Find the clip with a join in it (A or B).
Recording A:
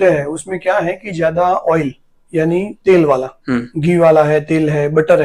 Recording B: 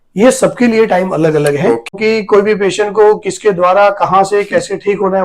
B